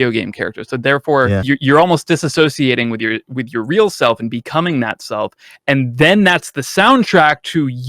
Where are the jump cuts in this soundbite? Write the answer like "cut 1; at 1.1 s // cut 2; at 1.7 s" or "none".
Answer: cut 1; at 1.4 s